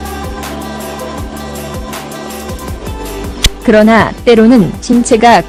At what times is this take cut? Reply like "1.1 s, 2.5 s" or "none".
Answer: none